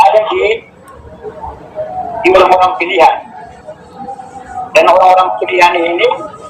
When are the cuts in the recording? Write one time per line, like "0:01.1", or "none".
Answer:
0:01.2